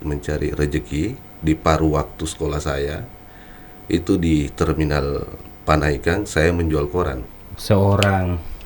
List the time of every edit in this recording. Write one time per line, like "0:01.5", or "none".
0:07.2